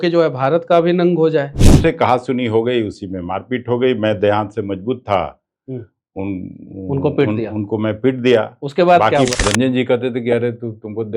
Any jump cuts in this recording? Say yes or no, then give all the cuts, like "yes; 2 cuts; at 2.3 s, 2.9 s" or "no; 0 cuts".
yes; 2 cuts; at 1.6 s, 9.4 s